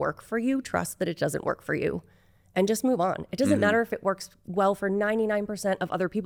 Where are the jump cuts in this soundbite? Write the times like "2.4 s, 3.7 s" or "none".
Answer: none